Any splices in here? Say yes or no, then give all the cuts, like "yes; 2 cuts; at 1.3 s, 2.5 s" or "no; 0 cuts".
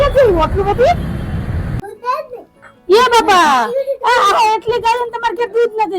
yes; 1 cut; at 1.8 s